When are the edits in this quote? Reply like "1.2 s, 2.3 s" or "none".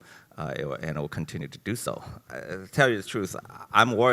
2.2 s